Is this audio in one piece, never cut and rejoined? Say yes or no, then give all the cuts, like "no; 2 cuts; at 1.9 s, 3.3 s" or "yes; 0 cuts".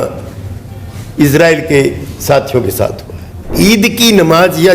no; 1 cut; at 3.5 s